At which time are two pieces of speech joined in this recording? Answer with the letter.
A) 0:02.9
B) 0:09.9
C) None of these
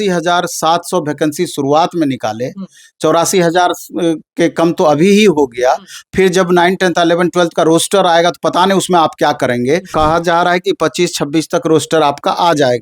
B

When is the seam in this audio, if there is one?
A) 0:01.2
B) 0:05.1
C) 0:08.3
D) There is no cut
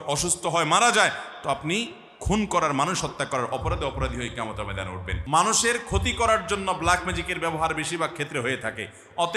B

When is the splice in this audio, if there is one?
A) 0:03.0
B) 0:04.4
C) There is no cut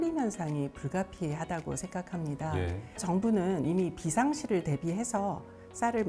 A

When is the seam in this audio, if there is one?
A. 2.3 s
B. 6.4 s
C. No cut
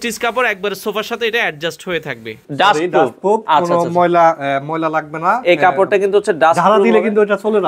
A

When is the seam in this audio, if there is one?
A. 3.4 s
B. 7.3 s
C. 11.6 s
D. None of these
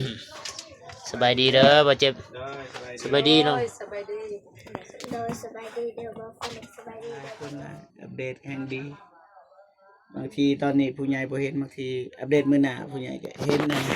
B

